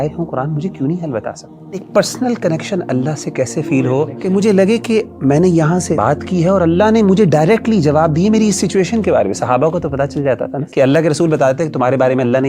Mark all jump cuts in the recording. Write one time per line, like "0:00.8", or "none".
0:01.8
0:04.1
0:06.0
0:10.6